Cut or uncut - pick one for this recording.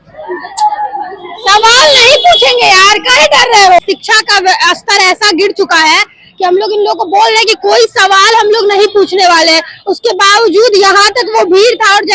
cut